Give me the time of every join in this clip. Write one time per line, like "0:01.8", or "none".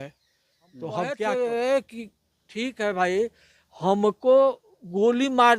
0:01.2